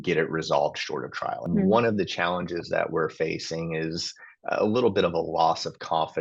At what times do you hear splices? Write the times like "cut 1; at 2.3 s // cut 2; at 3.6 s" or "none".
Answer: cut 1; at 1.5 s